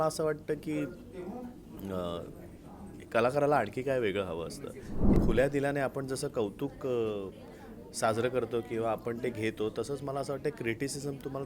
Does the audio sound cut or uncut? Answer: cut